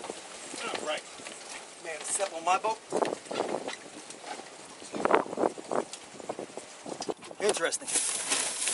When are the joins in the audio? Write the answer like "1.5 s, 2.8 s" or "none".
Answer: 7.2 s